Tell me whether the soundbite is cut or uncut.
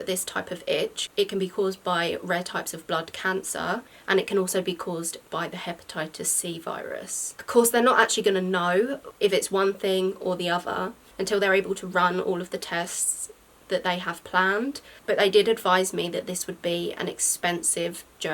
cut